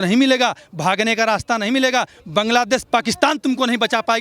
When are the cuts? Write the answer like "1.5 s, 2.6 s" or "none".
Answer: none